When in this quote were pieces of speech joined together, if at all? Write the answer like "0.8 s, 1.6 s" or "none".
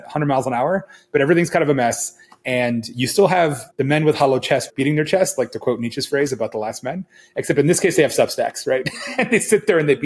3.6 s, 4.7 s